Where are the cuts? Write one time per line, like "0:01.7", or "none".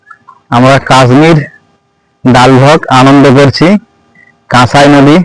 none